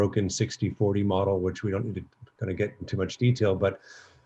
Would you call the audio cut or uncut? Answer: uncut